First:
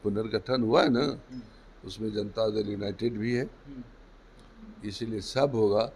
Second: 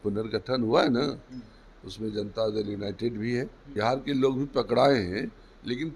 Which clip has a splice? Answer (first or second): second